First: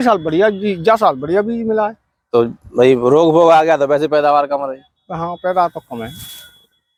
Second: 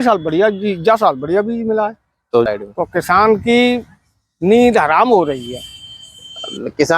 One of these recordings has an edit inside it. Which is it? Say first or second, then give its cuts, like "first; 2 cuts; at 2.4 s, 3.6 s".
second; 1 cut; at 2.5 s